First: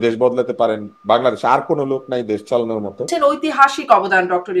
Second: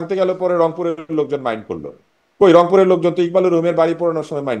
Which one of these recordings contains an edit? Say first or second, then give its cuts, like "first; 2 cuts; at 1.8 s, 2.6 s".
first; 1 cut; at 3.1 s